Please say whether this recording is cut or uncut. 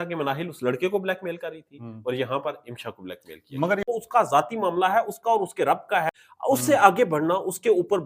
cut